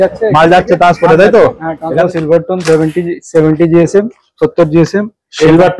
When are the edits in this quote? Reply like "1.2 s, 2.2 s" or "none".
2.0 s